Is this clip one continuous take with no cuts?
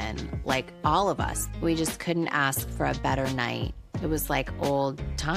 yes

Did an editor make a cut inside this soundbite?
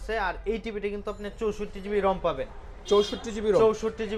no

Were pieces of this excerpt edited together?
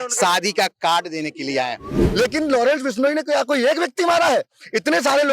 yes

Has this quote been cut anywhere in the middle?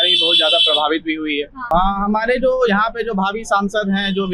yes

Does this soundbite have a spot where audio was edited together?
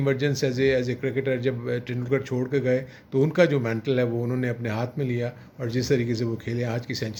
no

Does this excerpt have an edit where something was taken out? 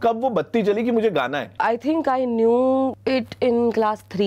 yes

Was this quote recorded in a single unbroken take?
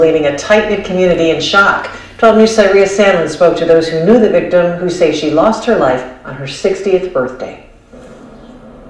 yes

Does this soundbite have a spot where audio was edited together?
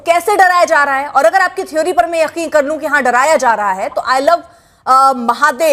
no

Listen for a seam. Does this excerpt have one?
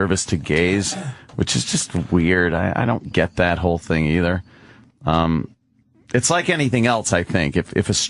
no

